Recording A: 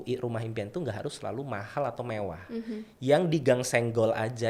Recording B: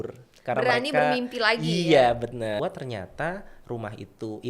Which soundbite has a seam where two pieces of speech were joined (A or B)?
B